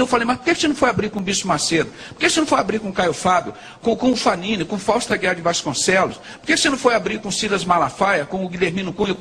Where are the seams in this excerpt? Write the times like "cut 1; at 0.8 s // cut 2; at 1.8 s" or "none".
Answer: none